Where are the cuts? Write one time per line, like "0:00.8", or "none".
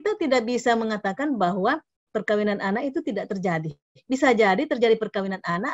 none

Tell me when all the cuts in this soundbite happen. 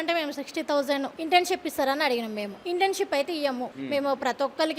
0:01.1
0:02.5
0:03.7

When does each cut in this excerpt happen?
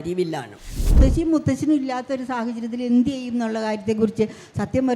0:01.0

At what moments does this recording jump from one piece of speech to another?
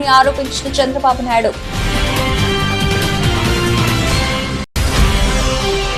0:01.8
0:04.7

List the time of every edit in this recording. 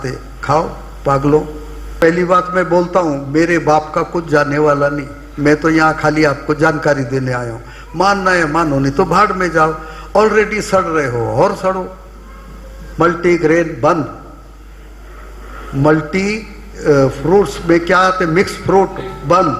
0:02.0

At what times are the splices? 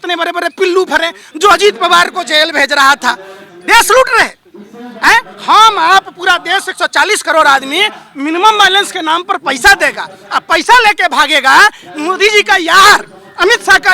none

